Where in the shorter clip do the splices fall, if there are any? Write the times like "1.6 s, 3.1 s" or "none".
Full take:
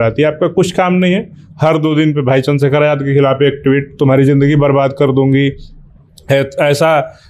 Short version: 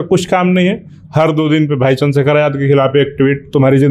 none